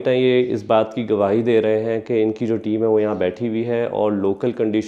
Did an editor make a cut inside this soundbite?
no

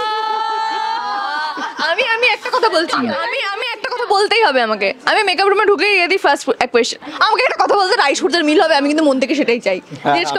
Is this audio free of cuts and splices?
yes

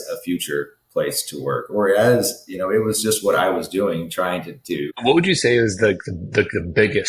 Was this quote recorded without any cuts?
no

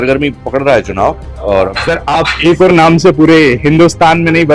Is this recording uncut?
no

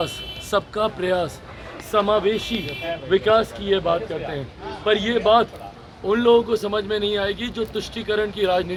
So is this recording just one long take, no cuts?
yes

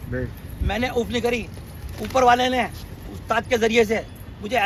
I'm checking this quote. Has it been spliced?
no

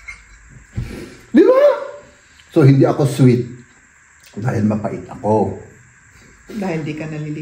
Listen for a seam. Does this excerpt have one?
no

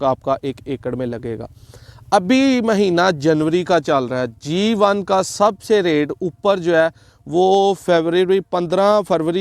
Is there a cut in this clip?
no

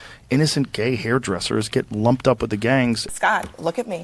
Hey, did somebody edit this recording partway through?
yes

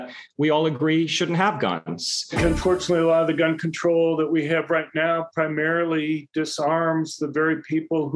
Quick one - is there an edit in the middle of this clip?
yes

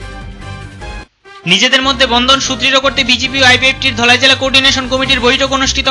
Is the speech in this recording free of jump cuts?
no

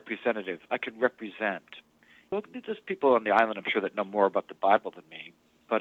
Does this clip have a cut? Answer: no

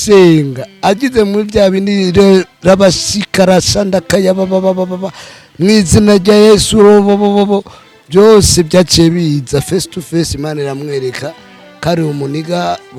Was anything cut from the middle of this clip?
no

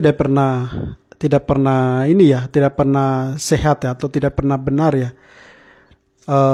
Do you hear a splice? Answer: no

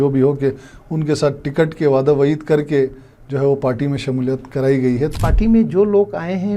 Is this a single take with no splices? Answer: no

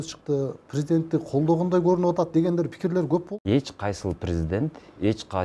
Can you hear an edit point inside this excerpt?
yes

